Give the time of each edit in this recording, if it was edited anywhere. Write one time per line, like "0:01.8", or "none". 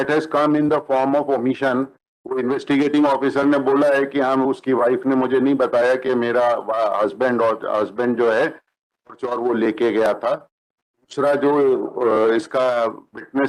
none